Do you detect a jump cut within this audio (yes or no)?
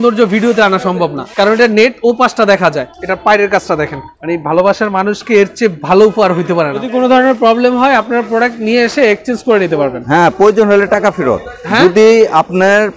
yes